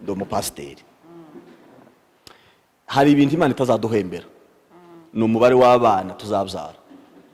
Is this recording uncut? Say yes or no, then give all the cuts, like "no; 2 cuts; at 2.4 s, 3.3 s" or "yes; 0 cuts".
yes; 0 cuts